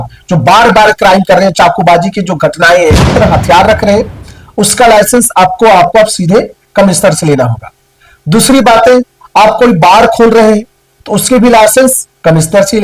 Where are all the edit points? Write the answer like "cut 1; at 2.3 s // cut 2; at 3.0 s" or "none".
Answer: cut 1; at 3.1 s